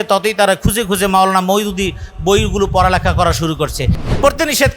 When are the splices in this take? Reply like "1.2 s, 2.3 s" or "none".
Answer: 3.9 s

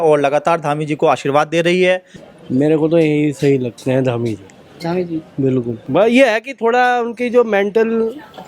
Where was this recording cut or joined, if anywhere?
2.2 s, 5.8 s

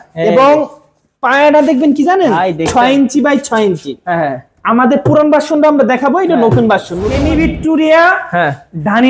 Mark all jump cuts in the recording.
7.1 s

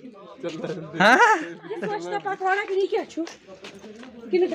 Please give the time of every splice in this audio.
none

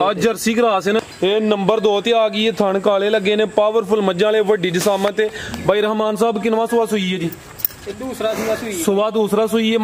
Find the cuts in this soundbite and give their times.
1.0 s

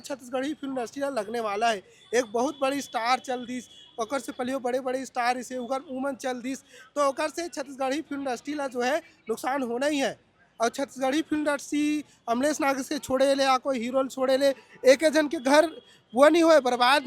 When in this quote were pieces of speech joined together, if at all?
none

